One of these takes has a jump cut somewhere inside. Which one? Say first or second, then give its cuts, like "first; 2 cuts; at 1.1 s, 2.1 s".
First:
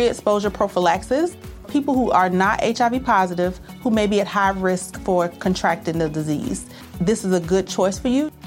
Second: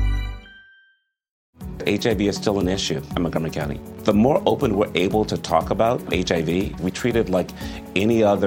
second; 1 cut; at 1.5 s